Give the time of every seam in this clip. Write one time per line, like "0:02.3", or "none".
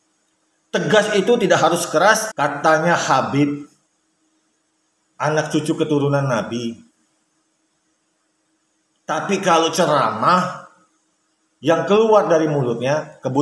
0:02.3